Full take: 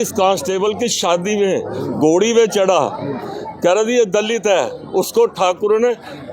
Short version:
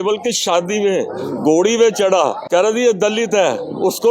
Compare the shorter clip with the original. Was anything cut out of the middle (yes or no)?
yes